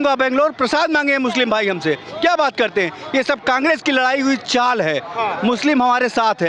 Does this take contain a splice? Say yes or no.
no